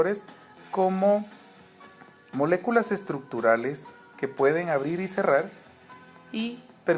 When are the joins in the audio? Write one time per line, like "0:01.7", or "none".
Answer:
0:05.1